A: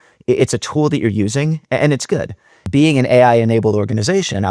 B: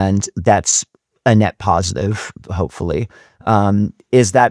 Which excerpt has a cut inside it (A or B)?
A